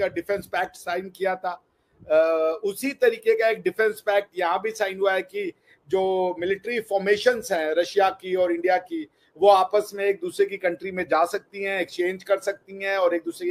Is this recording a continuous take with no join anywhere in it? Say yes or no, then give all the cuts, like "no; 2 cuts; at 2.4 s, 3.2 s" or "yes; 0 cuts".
yes; 0 cuts